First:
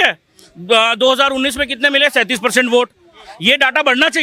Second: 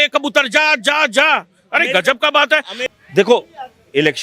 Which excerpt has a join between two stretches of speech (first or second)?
second